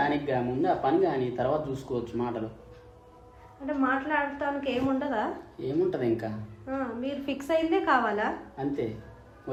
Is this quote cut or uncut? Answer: uncut